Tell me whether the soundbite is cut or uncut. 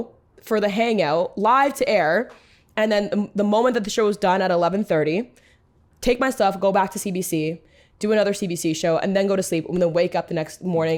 uncut